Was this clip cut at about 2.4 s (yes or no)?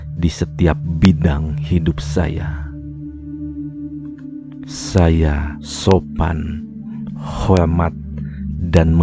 yes